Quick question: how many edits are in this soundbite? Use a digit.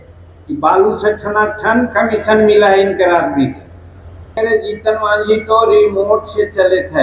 1